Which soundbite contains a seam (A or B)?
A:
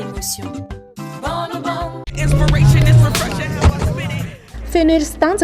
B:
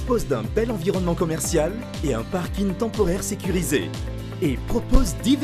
A